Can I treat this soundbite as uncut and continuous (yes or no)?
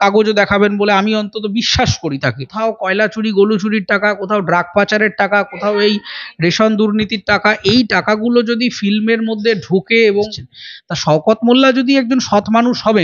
no